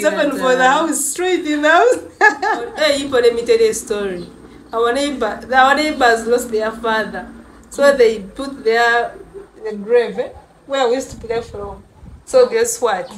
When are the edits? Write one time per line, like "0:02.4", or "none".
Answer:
0:02.7